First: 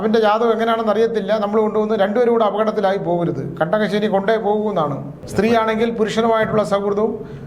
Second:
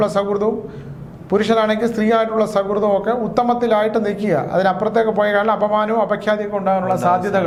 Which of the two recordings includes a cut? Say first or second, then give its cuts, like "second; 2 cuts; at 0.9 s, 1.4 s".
first; 1 cut; at 5.2 s